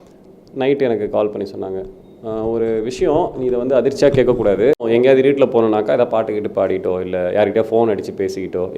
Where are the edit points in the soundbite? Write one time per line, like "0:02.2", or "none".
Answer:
0:04.9